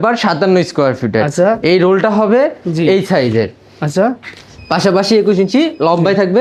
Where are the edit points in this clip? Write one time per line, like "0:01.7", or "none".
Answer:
none